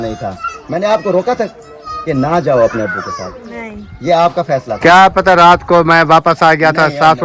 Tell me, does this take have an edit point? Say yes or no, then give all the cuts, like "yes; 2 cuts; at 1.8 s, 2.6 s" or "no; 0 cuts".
no; 0 cuts